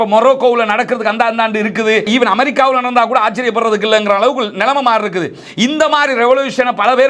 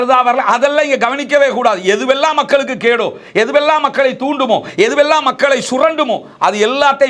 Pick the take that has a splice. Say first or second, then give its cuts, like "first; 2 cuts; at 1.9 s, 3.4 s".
first; 1 cut; at 2.1 s